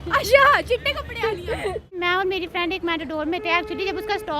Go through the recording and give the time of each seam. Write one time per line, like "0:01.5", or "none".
0:02.0